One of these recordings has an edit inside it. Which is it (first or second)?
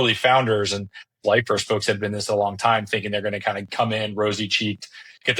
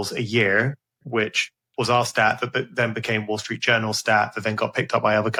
first